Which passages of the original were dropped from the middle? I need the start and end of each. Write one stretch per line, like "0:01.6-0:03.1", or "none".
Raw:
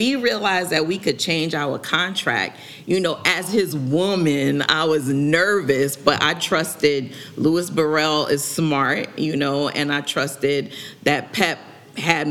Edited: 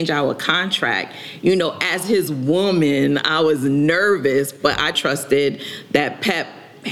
0:06.0-0:09.7